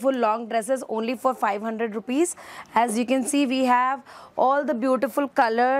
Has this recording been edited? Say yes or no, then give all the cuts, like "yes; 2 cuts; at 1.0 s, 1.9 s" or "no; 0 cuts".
no; 0 cuts